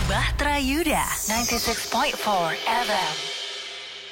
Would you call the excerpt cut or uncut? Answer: uncut